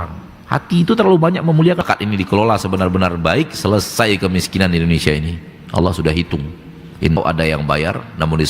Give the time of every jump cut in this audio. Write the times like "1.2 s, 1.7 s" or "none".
1.8 s, 7.2 s